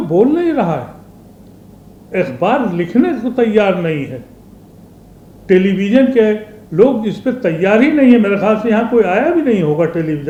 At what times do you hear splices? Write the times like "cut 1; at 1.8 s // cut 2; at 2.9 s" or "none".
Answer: none